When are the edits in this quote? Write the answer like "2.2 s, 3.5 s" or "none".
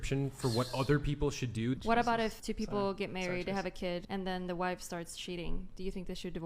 1.8 s, 2.4 s, 4.0 s